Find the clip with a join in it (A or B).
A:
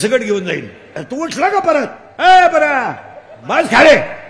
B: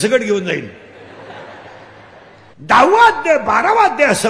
A